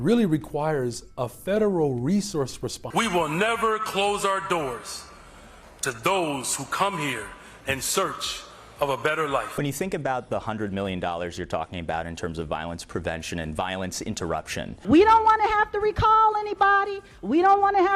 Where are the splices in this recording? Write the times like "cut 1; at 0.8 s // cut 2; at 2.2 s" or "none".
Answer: none